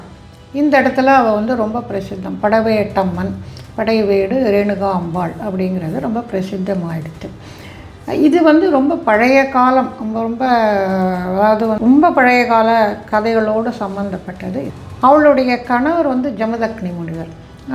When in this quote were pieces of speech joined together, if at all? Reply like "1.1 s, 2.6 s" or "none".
11.8 s, 14.8 s